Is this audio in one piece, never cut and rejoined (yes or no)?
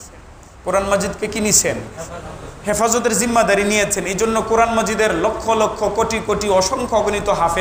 yes